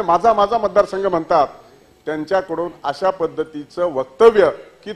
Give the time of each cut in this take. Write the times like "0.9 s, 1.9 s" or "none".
none